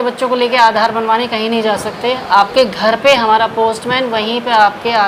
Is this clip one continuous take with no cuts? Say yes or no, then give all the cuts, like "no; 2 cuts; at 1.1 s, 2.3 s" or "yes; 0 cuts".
yes; 0 cuts